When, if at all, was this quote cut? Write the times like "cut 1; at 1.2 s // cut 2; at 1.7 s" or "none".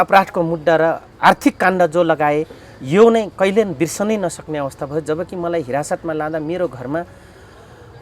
cut 1; at 1.1 s